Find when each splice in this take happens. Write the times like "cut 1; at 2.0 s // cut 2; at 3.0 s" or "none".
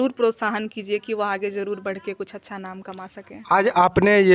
none